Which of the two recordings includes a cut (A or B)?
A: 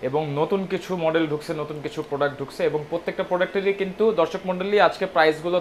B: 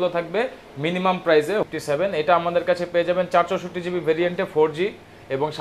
B